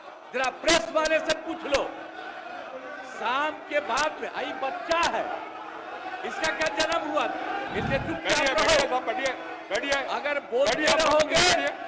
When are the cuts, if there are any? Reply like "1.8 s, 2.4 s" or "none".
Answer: 7.7 s